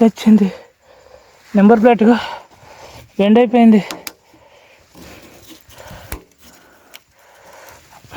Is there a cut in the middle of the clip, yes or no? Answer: no